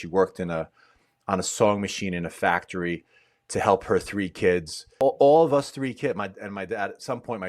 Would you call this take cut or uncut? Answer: cut